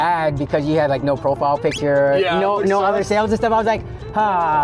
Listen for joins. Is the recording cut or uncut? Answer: uncut